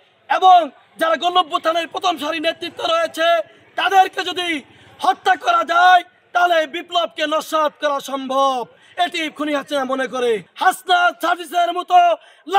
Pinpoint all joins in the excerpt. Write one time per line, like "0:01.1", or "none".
0:10.5